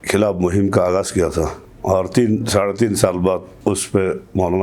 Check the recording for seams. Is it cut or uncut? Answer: cut